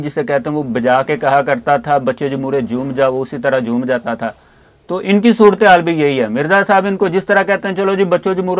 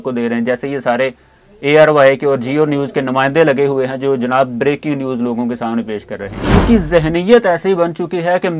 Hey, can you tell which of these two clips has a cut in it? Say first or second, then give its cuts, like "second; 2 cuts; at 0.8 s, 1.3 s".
second; 1 cut; at 6.5 s